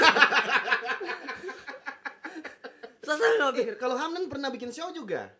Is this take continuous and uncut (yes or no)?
yes